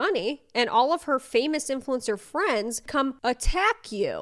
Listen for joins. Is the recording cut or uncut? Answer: uncut